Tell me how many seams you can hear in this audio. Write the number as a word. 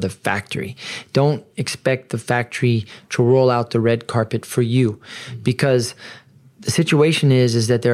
zero